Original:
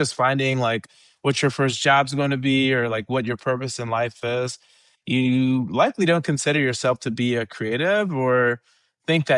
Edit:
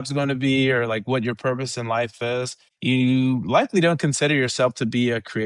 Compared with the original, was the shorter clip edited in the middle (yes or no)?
yes